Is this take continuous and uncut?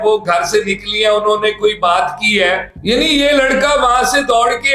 no; 1 cut; at 2.8 s

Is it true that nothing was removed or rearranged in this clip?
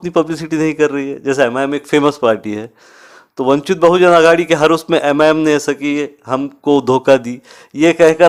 yes; 0 cuts

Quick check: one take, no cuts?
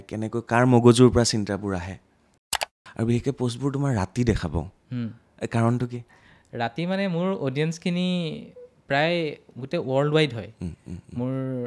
no; 1 cut; at 2.5 s

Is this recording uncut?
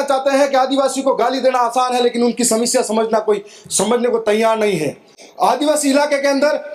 yes; 0 cuts

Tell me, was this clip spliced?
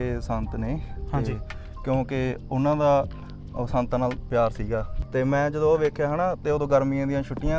yes; 1 cut; at 5.0 s

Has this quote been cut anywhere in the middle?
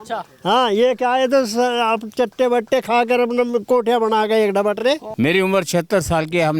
yes; 1 cut; at 5.1 s

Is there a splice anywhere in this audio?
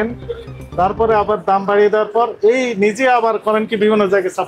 no; 0 cuts

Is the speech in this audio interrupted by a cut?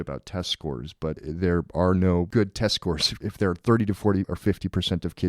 yes; 4 cuts; at 1.2 s, 2.3 s, 3.1 s, 4.3 s

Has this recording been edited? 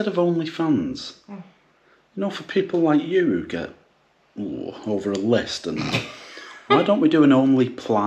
no; 0 cuts

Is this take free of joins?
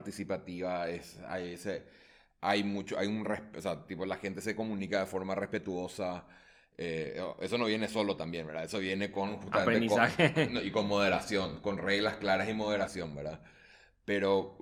yes; 0 cuts

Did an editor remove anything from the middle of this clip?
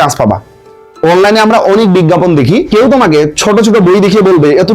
yes; 1 cut; at 2.7 s

